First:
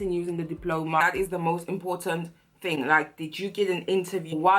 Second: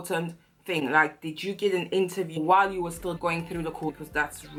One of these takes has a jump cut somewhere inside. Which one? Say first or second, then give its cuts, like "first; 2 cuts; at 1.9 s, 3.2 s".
first; 1 cut; at 1.0 s